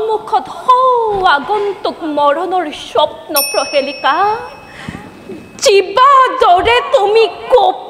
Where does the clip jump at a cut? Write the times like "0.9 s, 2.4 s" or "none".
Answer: none